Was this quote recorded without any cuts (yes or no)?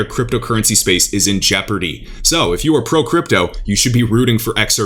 yes